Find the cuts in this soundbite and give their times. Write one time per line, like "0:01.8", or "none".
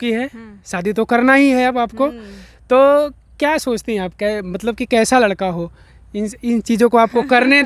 none